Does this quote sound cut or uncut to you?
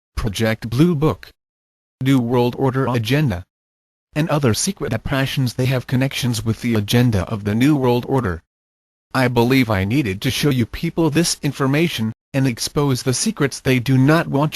cut